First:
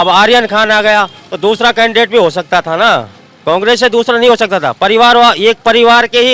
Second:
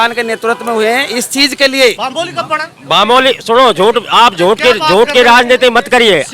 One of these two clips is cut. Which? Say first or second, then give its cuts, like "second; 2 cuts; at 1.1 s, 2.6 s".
second; 1 cut; at 2.0 s